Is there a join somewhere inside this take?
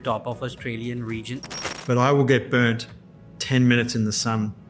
yes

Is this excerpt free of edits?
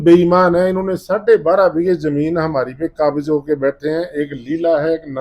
yes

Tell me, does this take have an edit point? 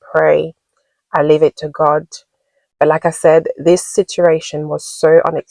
no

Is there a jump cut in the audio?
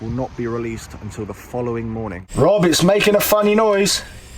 yes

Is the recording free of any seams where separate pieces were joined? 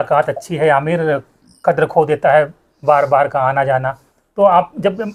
yes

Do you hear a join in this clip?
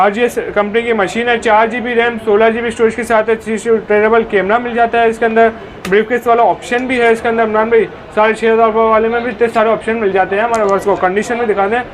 no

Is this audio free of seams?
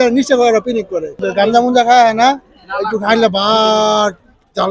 yes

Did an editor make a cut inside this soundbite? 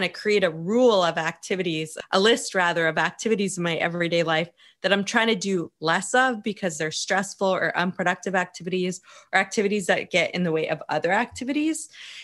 yes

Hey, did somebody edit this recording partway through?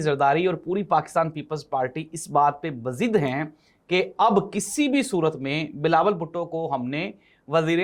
no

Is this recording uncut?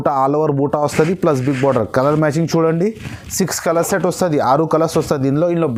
yes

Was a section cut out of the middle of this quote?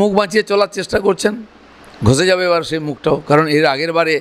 no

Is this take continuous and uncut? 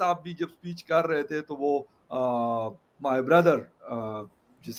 yes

